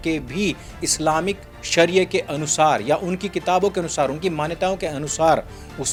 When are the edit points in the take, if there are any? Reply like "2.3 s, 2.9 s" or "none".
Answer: none